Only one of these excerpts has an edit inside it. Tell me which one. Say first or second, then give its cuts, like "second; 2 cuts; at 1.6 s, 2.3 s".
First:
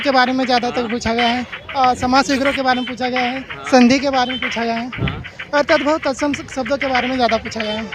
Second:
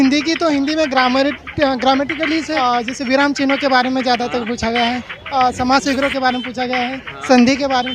second; 1 cut; at 2.5 s